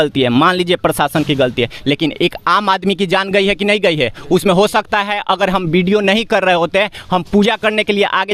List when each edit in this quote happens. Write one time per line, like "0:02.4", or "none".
none